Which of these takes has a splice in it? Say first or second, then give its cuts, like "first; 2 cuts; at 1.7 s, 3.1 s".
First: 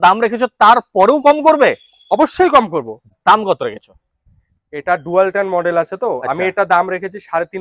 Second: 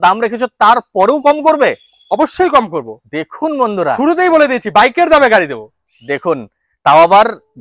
first; 1 cut; at 3.1 s